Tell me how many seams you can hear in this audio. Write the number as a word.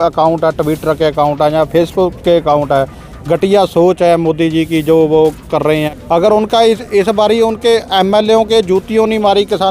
one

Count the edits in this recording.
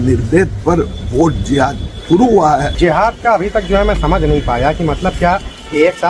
one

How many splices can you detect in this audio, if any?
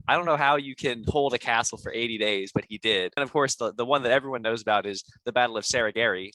one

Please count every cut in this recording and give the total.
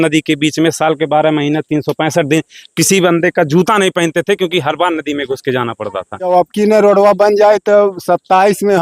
one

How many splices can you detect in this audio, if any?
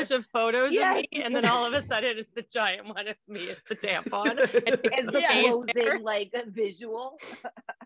zero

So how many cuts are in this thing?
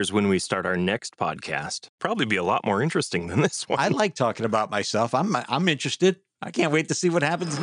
two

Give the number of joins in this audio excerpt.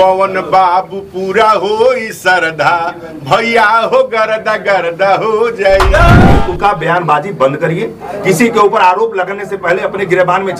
one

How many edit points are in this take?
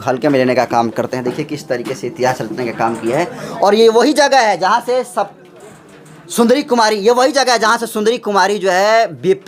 zero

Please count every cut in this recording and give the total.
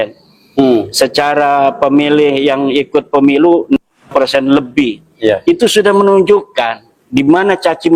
zero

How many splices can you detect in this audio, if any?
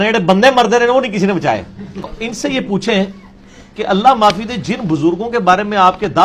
one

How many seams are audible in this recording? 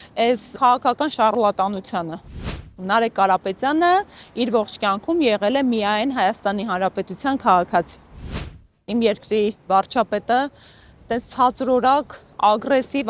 two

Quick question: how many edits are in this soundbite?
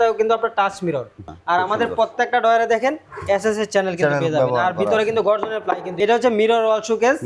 two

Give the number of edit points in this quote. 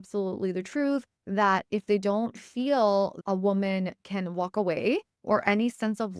three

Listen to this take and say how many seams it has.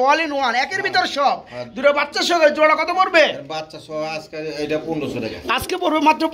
zero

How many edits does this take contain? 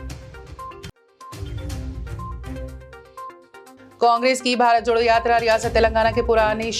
two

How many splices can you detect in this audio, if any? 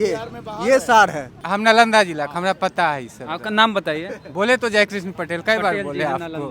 one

